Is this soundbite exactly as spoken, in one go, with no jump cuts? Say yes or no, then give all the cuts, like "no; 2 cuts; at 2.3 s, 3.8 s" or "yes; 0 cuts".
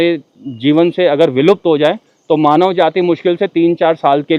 yes; 0 cuts